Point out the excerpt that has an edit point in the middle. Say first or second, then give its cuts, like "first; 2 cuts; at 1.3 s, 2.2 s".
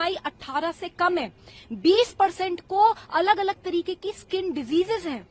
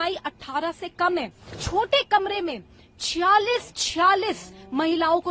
second; 1 cut; at 1.6 s